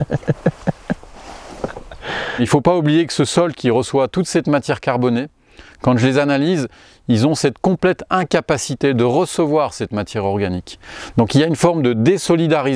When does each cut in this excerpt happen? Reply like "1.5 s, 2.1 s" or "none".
2.4 s

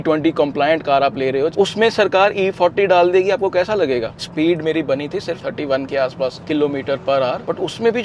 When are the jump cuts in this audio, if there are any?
1.5 s, 4.1 s

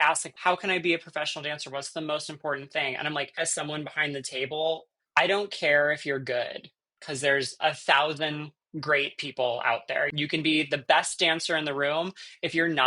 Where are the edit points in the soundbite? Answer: none

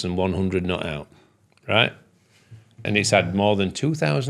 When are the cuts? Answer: 2.8 s

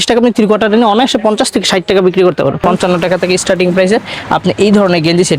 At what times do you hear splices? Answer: 2.6 s

